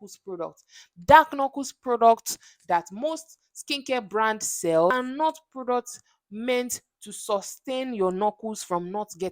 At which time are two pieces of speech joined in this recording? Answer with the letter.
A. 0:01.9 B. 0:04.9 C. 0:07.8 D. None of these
B